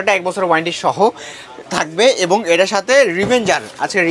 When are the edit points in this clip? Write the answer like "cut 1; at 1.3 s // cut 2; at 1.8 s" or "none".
none